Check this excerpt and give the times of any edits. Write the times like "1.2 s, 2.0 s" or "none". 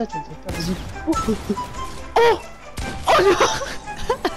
none